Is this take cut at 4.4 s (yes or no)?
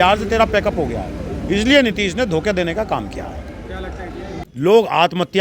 yes